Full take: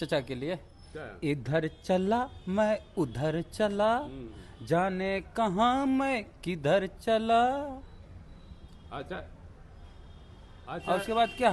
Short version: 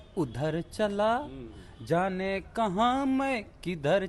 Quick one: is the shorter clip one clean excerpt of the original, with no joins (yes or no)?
yes